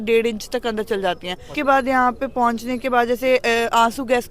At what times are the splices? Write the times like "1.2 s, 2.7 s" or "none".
1.5 s